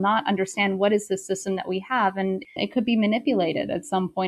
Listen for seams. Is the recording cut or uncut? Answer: cut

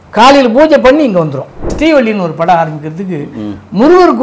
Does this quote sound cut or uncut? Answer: cut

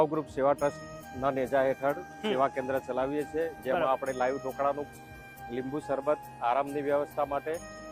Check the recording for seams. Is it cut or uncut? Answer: uncut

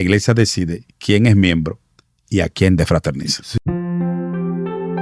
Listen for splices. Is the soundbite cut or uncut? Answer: cut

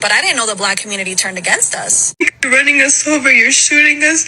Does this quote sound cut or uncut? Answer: cut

